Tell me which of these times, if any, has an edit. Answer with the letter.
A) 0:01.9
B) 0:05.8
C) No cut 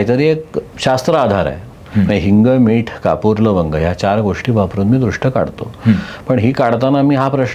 C